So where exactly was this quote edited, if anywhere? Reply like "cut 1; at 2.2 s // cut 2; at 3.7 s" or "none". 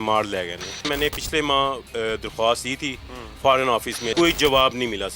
cut 1; at 0.9 s // cut 2; at 4.1 s